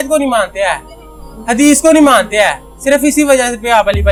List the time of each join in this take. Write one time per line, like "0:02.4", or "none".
none